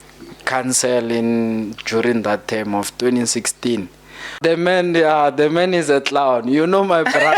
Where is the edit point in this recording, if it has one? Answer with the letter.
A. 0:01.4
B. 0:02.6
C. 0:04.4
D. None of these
C